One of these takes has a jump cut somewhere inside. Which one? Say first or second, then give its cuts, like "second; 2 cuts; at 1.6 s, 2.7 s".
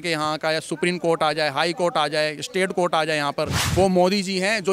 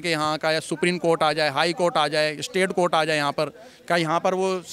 first; 1 cut; at 3.6 s